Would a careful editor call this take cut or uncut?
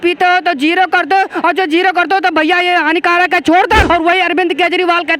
cut